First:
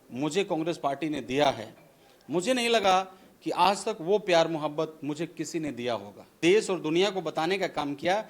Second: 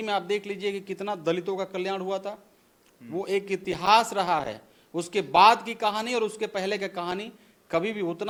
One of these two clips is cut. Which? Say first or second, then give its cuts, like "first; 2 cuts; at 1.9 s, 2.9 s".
first; 1 cut; at 6.4 s